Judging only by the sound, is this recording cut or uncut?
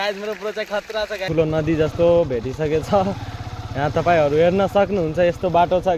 cut